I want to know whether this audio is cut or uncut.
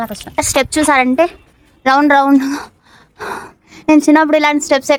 uncut